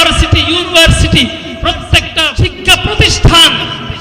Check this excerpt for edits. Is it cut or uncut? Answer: cut